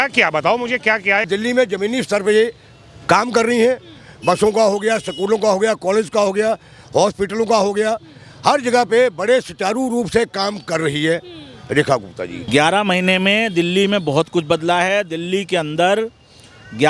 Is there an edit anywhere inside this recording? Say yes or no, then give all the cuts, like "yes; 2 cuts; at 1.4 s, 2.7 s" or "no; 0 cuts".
yes; 2 cuts; at 1.3 s, 12.4 s